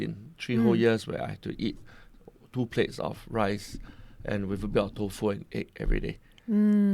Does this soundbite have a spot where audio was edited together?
no; 0 cuts

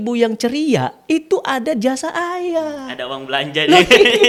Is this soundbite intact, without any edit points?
yes; 0 cuts

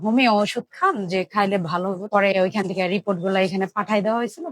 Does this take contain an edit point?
yes; 1 cut; at 2.1 s

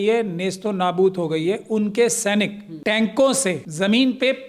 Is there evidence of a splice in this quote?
yes; 2 cuts; at 2.7 s, 3.7 s

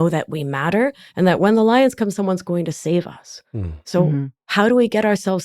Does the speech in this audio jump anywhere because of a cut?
yes; 1 cut; at 4.4 s

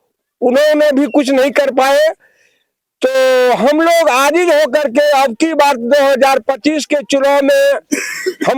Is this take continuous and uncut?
yes; 0 cuts

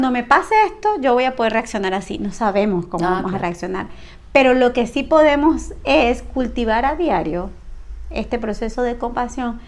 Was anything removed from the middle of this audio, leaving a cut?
no; 0 cuts

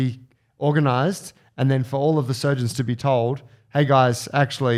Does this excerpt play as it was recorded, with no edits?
yes; 0 cuts

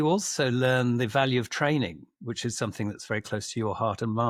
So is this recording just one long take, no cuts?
yes; 0 cuts

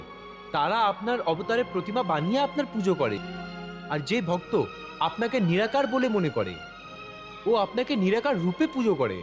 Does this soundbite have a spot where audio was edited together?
yes; 1 cut; at 3.2 s

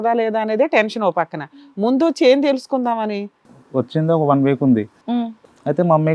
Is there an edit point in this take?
yes; 2 cuts; at 3.4 s, 5.2 s

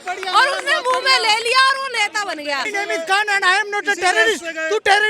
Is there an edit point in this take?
yes; 1 cut; at 2.7 s

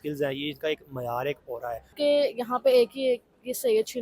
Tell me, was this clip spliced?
yes; 1 cut; at 1.9 s

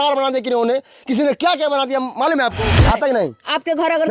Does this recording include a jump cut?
yes; 1 cut; at 2.7 s

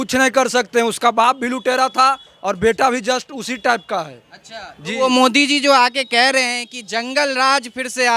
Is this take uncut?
yes; 0 cuts

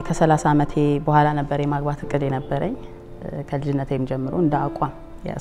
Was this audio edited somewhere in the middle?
no; 0 cuts

